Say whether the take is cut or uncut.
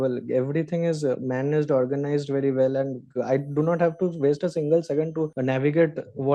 uncut